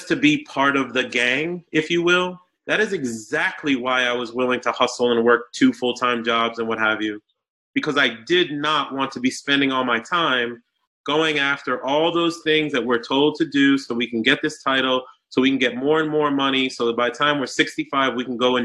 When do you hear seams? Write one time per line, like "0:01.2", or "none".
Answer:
none